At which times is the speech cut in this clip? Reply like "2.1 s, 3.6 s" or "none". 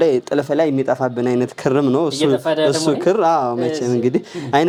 none